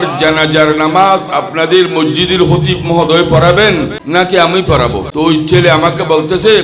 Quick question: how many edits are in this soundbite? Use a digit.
2